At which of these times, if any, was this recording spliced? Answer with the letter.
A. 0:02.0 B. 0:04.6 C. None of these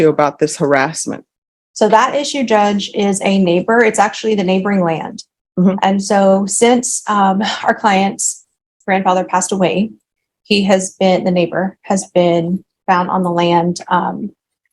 C